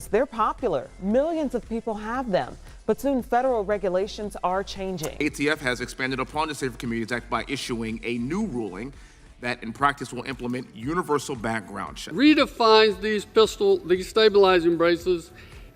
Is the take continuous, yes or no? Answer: yes